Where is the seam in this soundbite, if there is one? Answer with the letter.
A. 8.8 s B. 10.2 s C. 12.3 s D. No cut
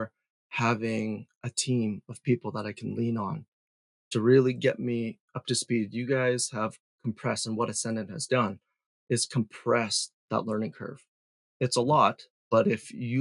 C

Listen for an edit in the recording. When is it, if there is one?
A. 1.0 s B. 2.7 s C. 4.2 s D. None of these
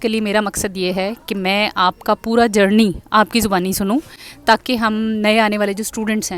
D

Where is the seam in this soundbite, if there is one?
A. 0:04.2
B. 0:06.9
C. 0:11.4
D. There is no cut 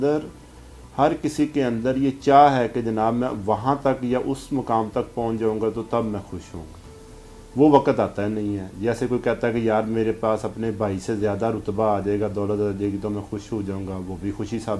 D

